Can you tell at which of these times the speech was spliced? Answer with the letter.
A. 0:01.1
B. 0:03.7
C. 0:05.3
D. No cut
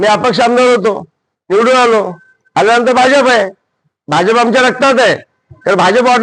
D